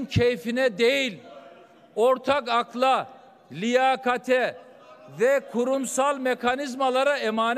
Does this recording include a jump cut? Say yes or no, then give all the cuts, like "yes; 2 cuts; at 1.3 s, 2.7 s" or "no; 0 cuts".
no; 0 cuts